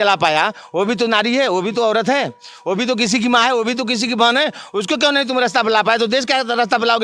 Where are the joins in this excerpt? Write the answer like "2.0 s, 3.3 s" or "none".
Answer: none